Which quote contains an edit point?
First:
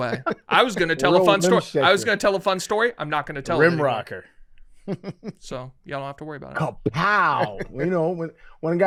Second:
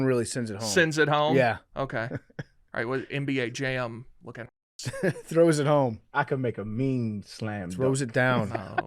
second; 1 cut; at 6.0 s

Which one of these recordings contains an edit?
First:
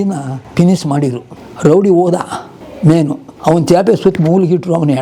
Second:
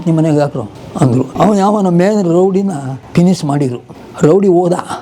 second; 1 cut; at 1.3 s

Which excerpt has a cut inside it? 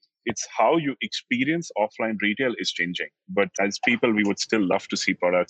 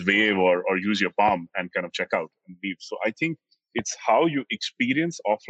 first; 1 cut; at 3.5 s

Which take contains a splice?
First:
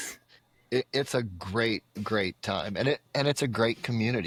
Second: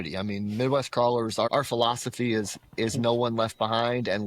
second; 1 cut; at 1.5 s

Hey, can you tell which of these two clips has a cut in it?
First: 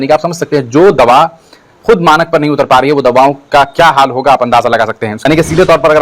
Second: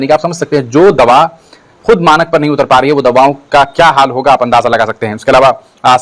first; 1 cut; at 5.1 s

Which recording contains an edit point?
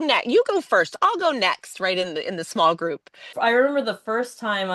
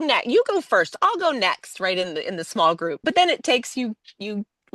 first; 1 cut; at 3.0 s

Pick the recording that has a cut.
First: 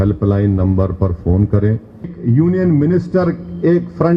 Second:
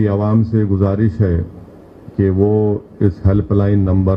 first; 1 cut; at 2.2 s

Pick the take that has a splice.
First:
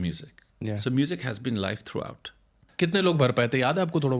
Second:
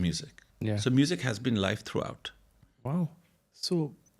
first; 1 cut; at 2.6 s

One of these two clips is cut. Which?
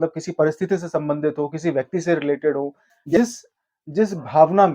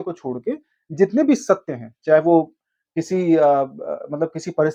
first; 1 cut; at 3.2 s

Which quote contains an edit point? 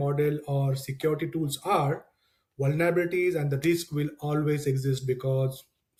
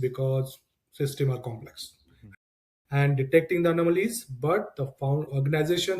second; 1 cut; at 2.5 s

